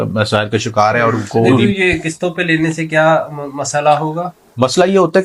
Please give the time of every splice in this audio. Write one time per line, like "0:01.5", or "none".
0:01.5